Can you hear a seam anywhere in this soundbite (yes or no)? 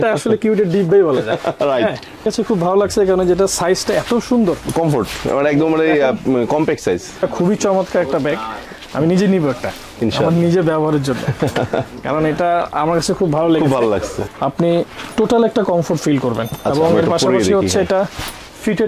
yes